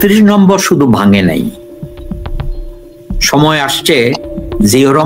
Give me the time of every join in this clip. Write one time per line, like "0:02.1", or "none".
0:01.6
0:03.2